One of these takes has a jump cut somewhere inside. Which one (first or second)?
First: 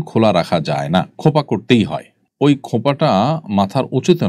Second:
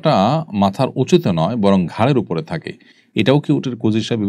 first